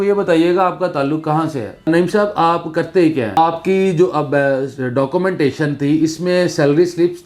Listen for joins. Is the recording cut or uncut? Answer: cut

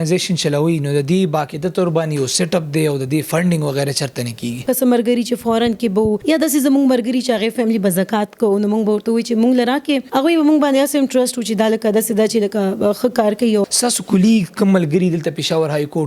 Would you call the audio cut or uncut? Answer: cut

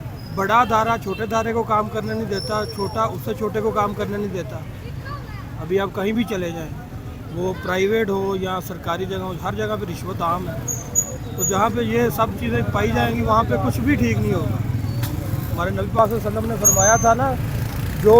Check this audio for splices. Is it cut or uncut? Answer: uncut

